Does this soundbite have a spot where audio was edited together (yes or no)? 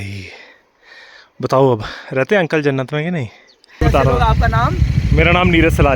yes